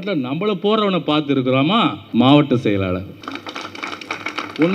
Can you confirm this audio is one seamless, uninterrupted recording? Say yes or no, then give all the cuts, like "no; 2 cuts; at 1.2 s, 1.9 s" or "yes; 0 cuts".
no; 2 cuts; at 2.0 s, 3.2 s